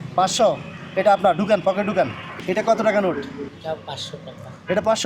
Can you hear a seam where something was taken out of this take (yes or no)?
yes